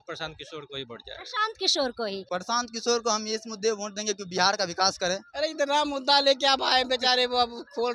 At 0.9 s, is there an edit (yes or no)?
no